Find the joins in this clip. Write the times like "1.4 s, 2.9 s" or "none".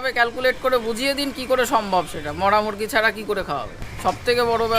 3.8 s